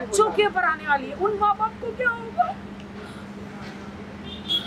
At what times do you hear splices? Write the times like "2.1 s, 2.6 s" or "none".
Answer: none